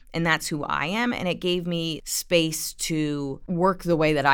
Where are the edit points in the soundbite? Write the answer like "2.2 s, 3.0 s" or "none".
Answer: 2.0 s, 3.4 s

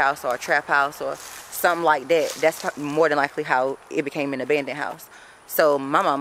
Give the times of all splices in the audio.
none

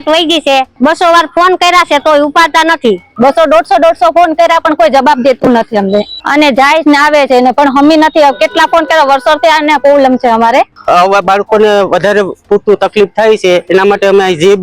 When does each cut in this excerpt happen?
3.1 s, 6.2 s, 10.7 s

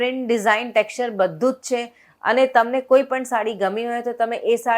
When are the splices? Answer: none

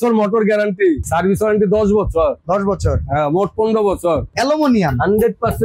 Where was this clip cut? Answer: 1.0 s, 4.3 s

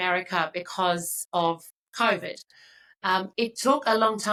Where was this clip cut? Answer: none

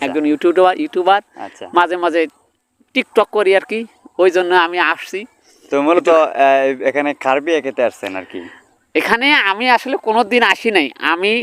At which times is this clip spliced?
none

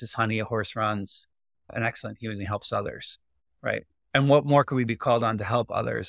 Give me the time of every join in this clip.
4.1 s

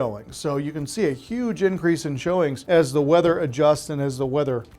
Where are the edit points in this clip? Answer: 2.6 s

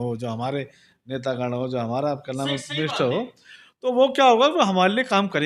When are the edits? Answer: none

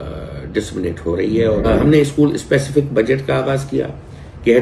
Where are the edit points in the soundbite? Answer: 1.7 s

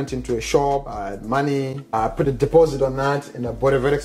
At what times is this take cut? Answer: 0.9 s, 1.9 s

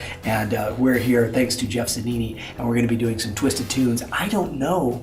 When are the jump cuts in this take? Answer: 1.6 s

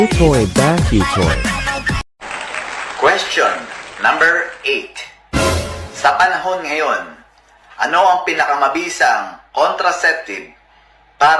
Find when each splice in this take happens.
2.1 s

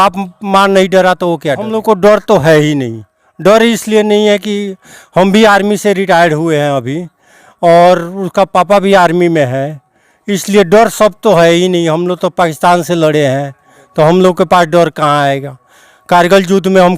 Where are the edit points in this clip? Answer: 1.7 s

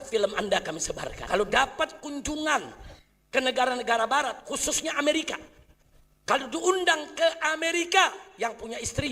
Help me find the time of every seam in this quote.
1.1 s

